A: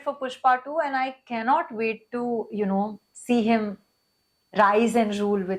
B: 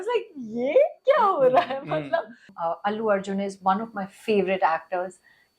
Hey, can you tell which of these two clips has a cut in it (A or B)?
B